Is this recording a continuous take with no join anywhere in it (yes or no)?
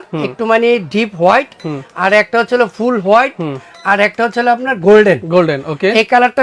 yes